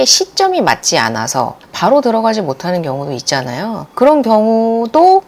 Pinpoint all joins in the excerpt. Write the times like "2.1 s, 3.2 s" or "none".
1.6 s

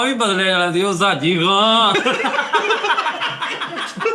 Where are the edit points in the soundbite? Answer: none

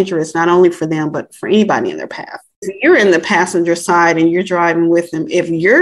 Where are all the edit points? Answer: 2.7 s

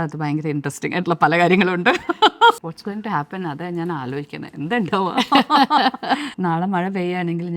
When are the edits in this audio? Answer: 2.6 s, 6.3 s

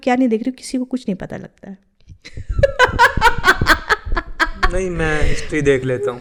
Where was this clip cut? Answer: none

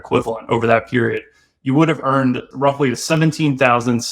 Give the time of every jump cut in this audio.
2.5 s

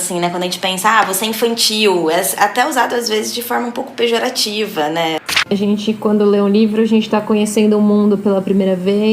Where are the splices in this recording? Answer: 5.5 s

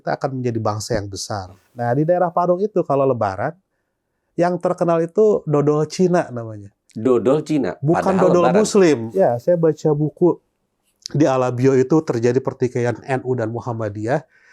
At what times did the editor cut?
1.6 s, 9.1 s

